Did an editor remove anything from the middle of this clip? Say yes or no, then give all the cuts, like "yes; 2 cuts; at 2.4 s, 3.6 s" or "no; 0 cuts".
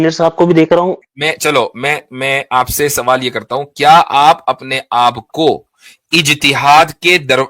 yes; 1 cut; at 1.0 s